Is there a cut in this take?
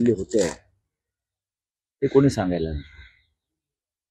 no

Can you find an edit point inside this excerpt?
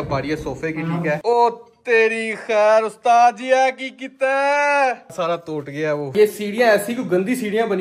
yes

